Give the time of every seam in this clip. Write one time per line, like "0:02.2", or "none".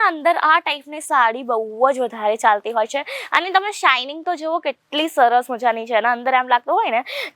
none